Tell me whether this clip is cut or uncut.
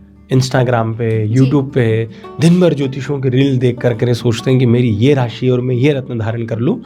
uncut